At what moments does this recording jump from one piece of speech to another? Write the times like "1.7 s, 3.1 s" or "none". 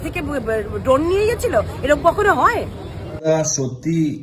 3.3 s